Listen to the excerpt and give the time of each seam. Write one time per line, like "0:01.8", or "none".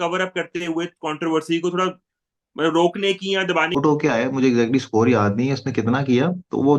0:03.8